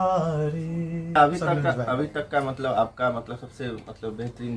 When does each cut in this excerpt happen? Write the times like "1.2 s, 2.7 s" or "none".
1.1 s